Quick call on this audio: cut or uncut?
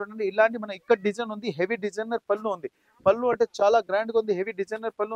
uncut